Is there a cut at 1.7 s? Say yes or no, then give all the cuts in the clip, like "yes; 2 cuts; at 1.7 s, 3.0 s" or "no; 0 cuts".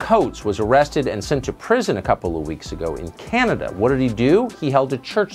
no; 0 cuts